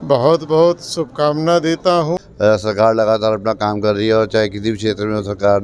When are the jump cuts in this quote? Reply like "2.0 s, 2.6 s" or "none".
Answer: 2.2 s